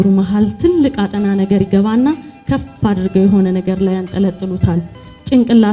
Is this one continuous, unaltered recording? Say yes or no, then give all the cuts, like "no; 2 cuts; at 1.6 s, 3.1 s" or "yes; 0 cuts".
yes; 0 cuts